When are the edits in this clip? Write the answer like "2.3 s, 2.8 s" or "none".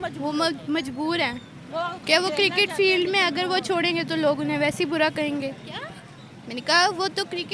none